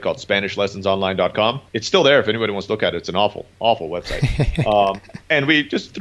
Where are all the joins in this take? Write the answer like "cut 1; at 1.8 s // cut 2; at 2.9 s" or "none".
cut 1; at 1.7 s // cut 2; at 5.1 s